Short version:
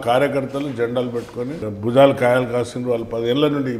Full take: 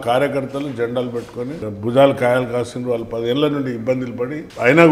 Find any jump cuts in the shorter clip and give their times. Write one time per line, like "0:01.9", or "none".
none